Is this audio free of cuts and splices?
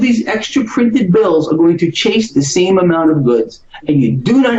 yes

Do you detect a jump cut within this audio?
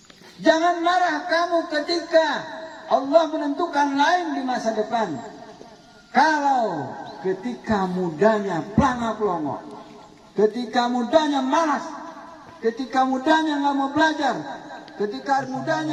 no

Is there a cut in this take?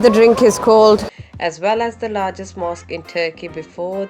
yes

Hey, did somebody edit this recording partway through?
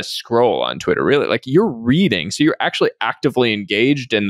no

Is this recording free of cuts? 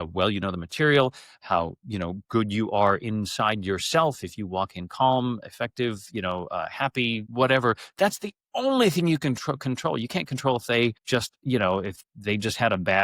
no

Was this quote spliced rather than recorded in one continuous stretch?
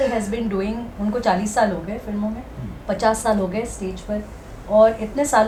no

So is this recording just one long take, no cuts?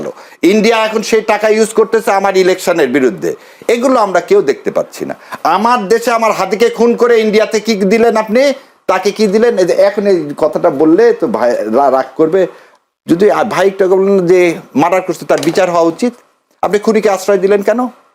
yes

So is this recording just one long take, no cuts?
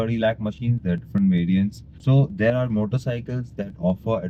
no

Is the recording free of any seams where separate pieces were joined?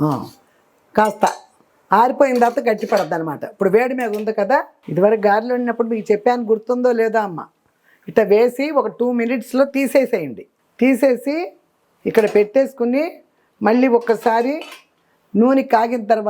no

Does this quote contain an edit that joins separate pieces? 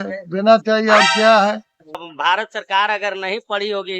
yes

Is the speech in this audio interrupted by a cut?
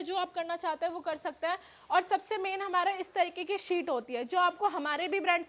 no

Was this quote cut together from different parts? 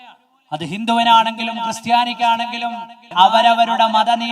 yes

